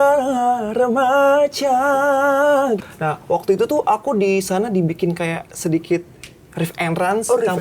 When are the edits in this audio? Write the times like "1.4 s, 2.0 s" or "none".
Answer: 2.9 s